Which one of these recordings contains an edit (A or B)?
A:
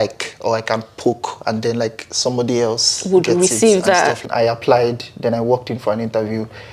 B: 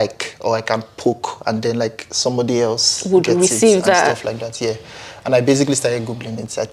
A